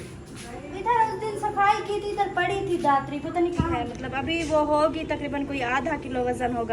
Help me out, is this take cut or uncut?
cut